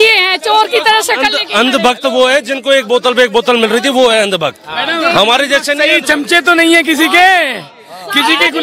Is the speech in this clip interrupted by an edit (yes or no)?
no